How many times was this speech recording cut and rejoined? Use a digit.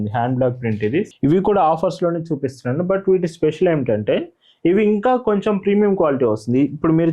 1